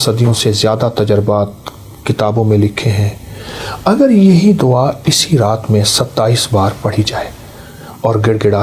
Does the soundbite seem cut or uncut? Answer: uncut